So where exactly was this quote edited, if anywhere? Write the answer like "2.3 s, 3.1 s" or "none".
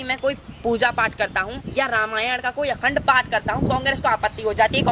1.6 s